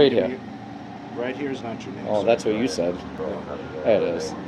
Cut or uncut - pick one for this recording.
uncut